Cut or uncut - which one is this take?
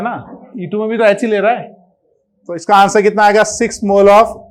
uncut